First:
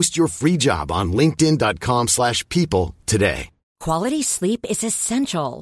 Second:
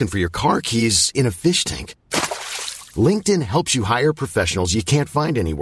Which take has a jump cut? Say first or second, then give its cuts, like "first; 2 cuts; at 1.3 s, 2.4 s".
first; 1 cut; at 3.7 s